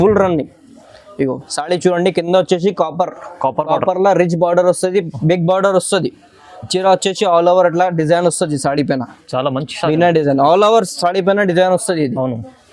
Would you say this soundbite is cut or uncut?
uncut